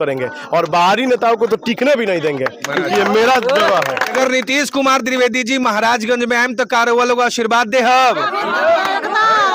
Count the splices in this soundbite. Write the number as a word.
one